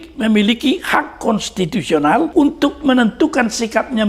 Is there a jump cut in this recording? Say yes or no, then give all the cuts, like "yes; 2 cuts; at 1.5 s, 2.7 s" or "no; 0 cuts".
yes; 1 cut; at 2.3 s